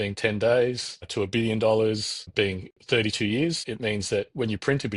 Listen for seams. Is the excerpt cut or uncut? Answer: cut